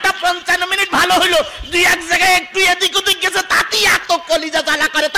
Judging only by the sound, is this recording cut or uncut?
uncut